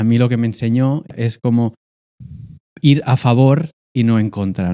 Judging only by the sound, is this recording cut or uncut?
cut